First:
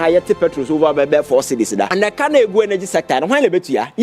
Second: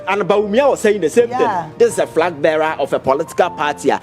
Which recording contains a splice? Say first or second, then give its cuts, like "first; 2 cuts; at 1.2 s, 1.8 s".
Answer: first; 1 cut; at 1.9 s